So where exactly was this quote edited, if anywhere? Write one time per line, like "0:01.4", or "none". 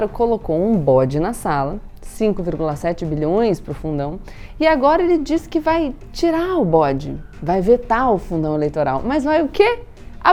none